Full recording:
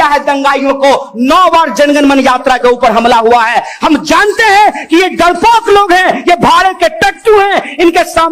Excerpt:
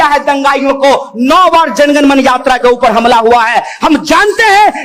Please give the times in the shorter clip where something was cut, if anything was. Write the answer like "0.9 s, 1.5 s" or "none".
none